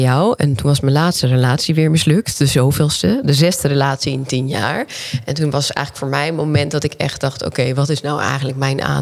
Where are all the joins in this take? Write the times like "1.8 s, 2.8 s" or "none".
none